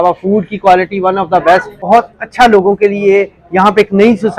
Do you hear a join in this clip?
yes; 1 cut; at 1.8 s

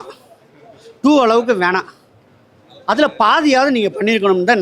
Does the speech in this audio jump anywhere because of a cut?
no; 0 cuts

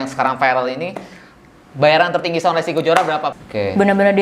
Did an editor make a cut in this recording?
yes; 1 cut; at 3.3 s

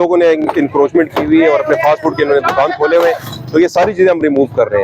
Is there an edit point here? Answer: no; 0 cuts

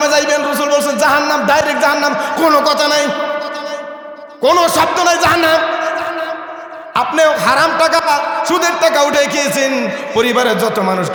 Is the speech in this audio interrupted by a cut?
no; 0 cuts

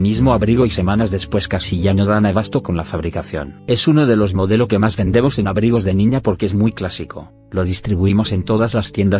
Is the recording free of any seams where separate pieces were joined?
no; 1 cut; at 2.2 s

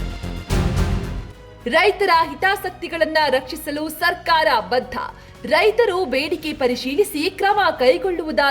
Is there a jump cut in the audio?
yes; 1 cut; at 1.4 s

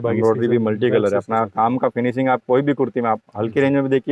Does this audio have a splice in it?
no; 0 cuts

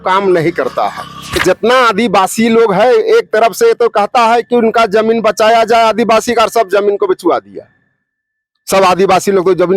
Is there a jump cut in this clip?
yes; 1 cut; at 1.4 s

